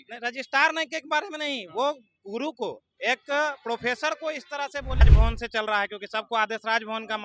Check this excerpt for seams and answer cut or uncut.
cut